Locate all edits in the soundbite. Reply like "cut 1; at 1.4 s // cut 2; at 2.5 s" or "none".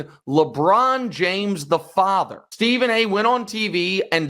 cut 1; at 2.4 s